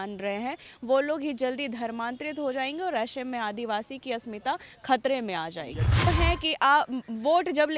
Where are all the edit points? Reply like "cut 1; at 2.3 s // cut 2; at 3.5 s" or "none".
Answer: cut 1; at 6.1 s